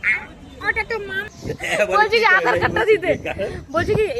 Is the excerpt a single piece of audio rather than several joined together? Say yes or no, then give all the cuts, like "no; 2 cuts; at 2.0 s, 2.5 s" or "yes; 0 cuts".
no; 1 cut; at 1.3 s